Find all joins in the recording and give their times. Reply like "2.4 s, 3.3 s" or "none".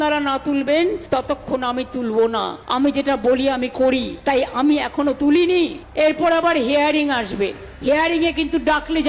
1.0 s, 2.6 s, 4.4 s, 5.8 s